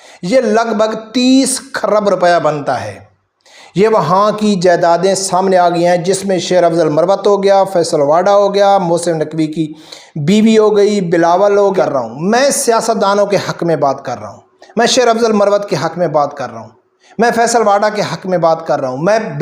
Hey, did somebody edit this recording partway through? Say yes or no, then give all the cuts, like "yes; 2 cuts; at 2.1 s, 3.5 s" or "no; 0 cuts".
yes; 1 cut; at 11.7 s